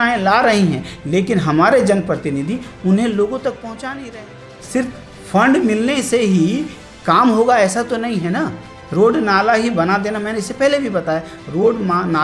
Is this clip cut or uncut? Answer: uncut